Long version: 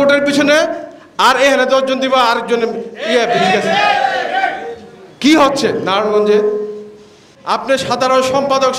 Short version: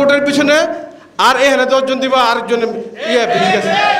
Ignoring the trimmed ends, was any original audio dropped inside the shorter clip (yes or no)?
no